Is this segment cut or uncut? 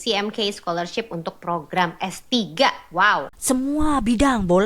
cut